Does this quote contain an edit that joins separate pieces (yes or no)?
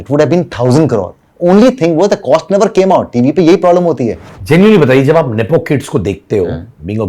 yes